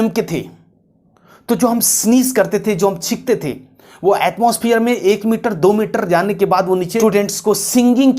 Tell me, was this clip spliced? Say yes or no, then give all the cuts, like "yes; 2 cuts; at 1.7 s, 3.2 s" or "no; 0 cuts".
yes; 1 cut; at 7.0 s